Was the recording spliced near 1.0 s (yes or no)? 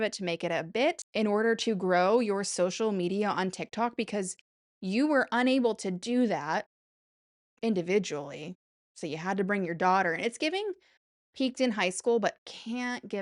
yes